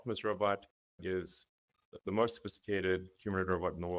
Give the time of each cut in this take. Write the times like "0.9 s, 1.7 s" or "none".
none